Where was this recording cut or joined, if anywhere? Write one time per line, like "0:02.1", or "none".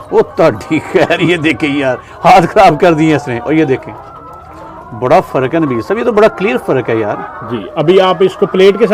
none